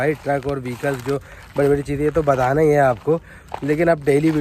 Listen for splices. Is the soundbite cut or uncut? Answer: uncut